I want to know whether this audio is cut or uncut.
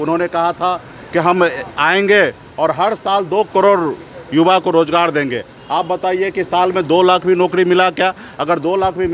uncut